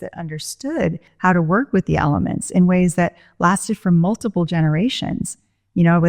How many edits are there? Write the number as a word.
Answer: one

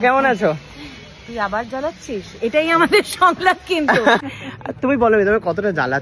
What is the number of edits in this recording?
one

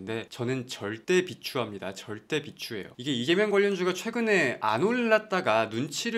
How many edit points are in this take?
zero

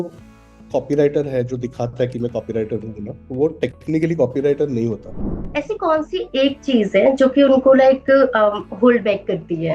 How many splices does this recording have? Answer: one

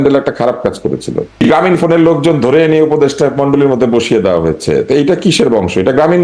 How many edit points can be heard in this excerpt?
one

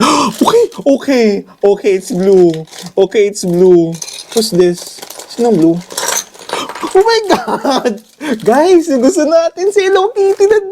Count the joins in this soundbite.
zero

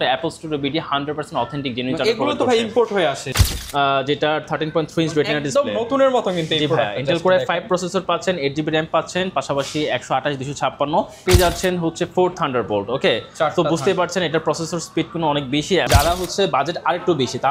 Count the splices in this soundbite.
three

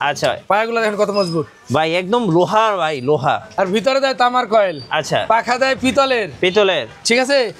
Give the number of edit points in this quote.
one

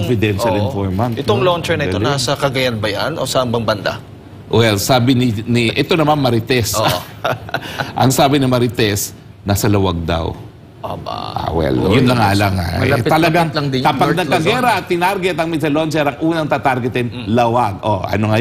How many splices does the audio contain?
zero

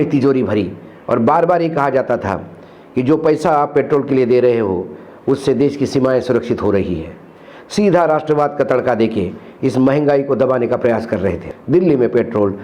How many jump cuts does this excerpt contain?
one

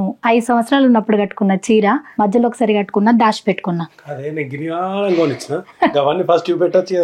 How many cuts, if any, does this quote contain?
one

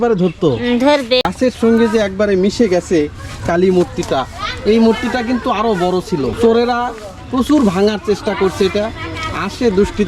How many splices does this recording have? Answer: two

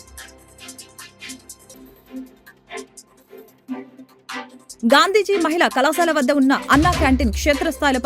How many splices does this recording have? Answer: two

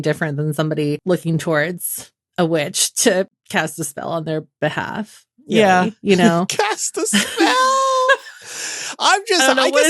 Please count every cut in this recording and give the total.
two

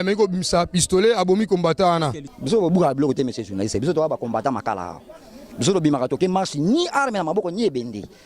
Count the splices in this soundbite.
one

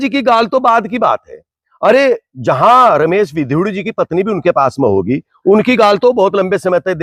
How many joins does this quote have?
zero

